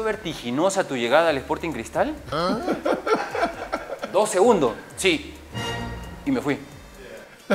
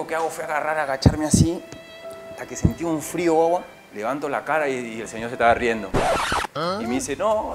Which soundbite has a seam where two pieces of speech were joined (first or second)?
second